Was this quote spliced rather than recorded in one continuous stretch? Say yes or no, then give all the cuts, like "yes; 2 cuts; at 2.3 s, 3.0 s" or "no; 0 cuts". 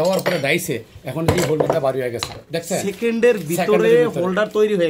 no; 0 cuts